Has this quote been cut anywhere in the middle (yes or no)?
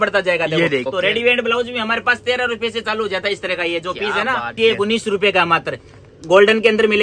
yes